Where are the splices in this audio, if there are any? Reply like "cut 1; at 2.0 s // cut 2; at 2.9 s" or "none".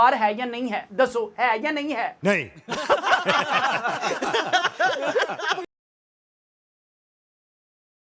none